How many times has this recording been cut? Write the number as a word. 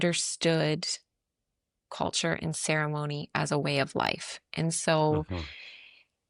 zero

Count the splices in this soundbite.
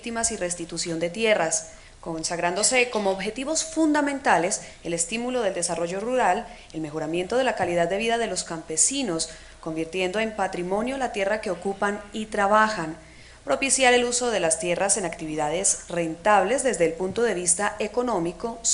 one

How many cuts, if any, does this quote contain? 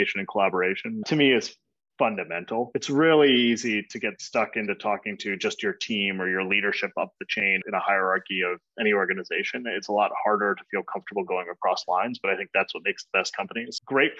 one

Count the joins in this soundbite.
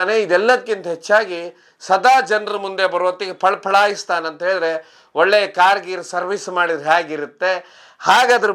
zero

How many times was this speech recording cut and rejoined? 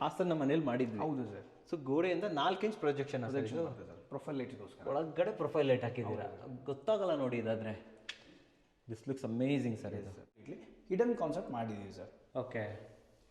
one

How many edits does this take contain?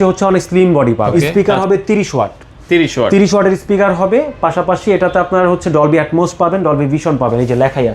one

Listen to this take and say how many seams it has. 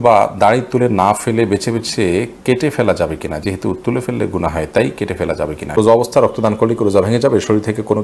one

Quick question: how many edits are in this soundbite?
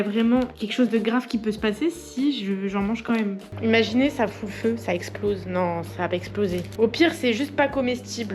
two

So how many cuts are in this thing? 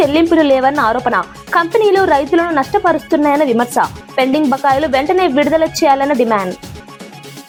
zero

